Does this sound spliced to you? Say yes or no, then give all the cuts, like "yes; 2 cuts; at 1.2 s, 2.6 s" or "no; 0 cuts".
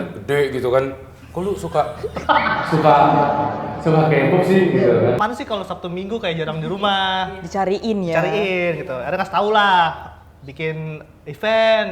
yes; 1 cut; at 5.3 s